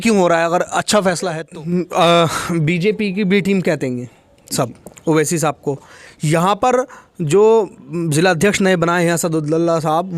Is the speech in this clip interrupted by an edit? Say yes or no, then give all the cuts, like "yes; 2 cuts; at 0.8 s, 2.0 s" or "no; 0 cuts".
yes; 1 cut; at 1.4 s